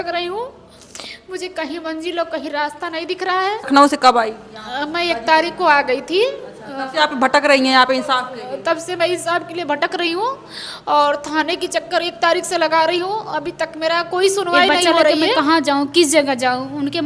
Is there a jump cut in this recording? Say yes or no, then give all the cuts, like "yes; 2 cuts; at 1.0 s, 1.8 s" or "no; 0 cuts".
yes; 2 cuts; at 3.7 s, 15.1 s